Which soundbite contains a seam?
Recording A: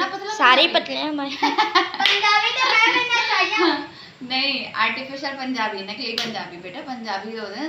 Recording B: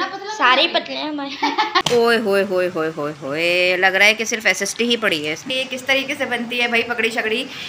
B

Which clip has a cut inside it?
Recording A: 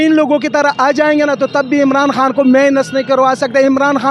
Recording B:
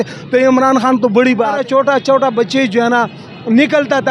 B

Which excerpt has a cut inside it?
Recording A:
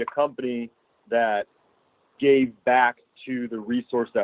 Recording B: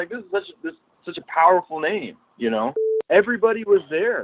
B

